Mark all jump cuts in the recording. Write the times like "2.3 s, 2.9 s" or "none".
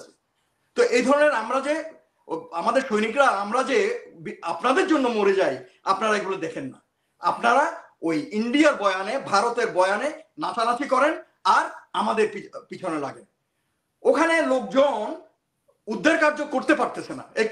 none